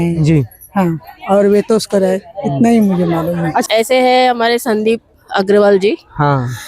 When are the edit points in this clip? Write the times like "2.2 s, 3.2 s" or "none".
3.6 s